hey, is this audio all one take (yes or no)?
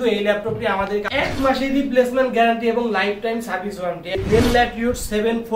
no